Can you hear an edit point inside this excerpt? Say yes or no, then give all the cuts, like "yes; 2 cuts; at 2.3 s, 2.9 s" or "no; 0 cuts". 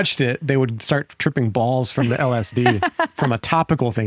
no; 0 cuts